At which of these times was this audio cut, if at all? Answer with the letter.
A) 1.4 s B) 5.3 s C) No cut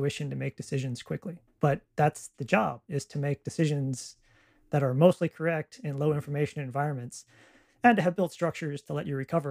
A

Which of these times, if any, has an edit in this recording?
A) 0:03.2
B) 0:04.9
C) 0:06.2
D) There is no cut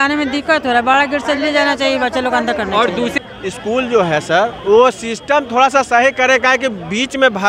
A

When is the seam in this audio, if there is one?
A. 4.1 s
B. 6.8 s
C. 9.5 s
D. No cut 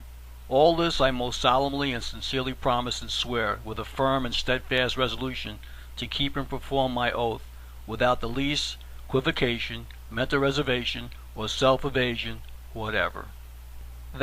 C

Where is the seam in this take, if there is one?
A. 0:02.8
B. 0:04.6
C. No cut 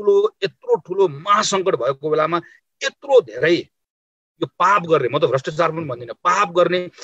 C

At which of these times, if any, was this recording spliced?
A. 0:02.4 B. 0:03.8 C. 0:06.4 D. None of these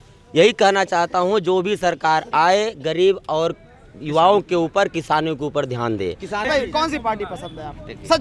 C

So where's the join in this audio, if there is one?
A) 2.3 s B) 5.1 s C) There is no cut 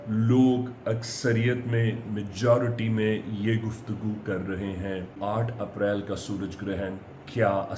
B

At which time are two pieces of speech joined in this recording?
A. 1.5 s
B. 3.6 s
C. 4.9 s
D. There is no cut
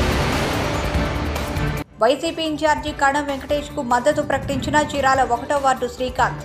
D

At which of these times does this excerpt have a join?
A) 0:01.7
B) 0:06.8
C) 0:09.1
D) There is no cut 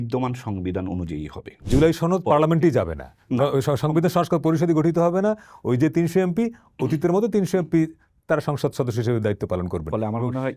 A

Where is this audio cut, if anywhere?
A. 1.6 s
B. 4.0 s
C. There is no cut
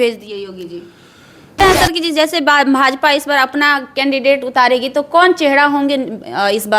A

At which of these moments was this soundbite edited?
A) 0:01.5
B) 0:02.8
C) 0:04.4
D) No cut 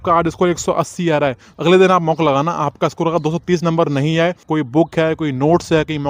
C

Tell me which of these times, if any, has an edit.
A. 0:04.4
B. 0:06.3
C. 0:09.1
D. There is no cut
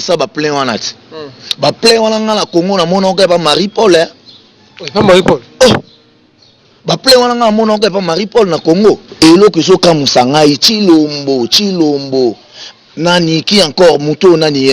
C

